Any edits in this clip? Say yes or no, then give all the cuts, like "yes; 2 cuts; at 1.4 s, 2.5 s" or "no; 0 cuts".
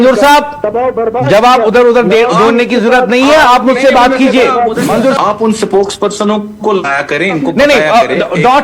yes; 1 cut; at 5.2 s